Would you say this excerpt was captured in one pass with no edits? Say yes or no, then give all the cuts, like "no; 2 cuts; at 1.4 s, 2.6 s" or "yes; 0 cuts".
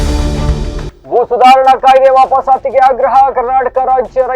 no; 1 cut; at 0.9 s